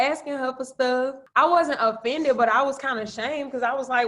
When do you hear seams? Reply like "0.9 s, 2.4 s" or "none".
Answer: 1.2 s